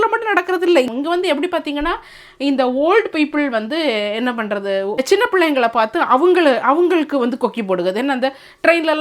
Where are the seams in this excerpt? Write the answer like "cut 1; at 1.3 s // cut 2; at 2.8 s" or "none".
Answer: cut 1; at 0.9 s // cut 2; at 5.0 s